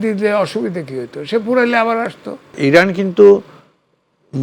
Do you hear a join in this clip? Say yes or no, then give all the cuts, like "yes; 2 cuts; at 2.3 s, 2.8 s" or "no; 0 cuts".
yes; 1 cut; at 2.6 s